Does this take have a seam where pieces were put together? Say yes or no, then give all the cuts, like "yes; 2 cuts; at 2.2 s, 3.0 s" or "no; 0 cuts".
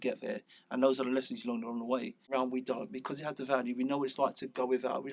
yes; 1 cut; at 2.3 s